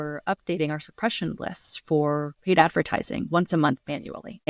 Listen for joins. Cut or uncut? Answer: uncut